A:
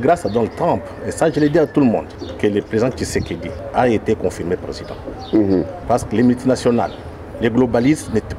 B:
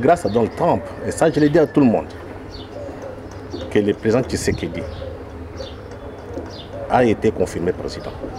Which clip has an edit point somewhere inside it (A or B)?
A